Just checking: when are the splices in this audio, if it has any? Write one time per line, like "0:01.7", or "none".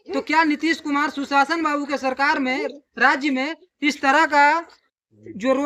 none